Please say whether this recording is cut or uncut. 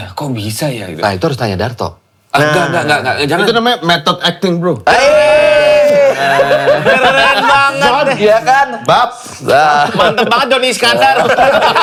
uncut